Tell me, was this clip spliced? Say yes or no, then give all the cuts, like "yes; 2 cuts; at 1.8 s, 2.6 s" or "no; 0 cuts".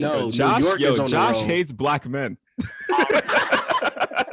no; 0 cuts